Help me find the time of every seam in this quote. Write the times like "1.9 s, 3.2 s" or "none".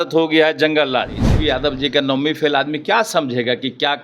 1.2 s